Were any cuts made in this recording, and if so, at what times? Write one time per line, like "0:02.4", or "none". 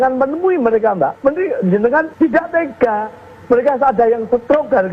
0:01.2
0:02.1

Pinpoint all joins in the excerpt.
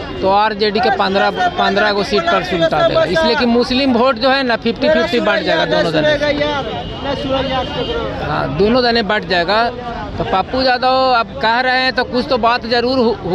none

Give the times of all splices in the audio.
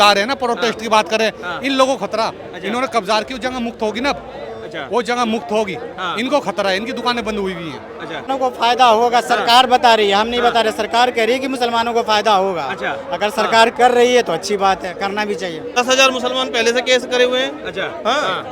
0:08.3
0:15.8

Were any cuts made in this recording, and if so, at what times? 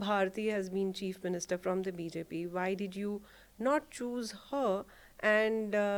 none

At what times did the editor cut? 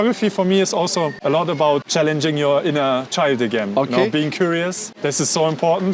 0:01.2
0:01.9
0:04.9

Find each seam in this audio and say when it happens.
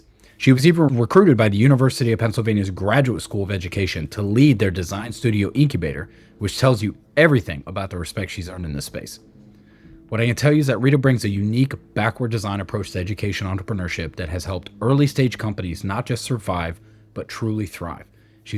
0:00.9

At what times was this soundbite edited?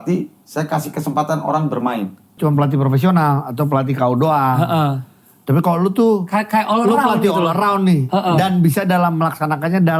0:02.3

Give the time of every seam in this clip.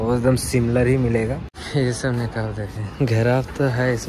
0:01.5

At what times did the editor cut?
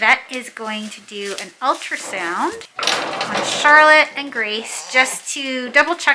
0:02.7

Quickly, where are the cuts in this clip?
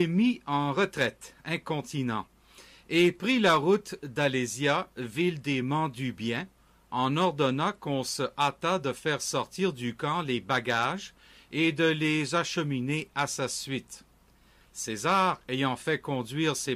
0:11.6

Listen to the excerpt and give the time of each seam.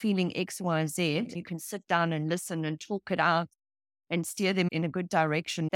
0:01.4
0:04.7

